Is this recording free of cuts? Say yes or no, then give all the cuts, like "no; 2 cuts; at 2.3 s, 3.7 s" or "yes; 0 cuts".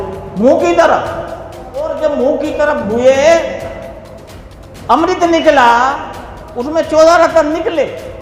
no; 1 cut; at 1.8 s